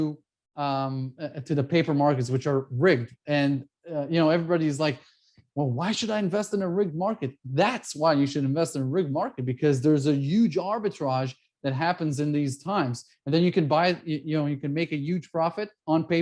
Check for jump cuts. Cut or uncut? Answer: uncut